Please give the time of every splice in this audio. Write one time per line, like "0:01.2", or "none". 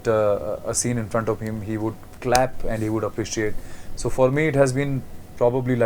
none